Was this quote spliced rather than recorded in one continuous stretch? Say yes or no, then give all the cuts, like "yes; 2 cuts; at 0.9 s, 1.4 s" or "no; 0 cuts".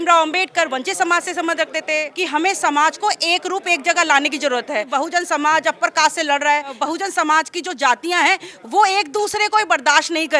yes; 3 cuts; at 2.1 s, 4.9 s, 6.8 s